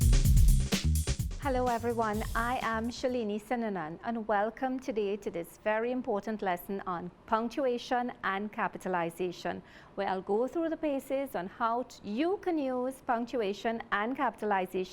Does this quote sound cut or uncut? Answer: cut